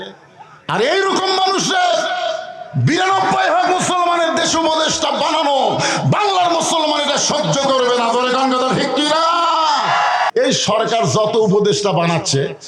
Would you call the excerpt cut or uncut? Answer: cut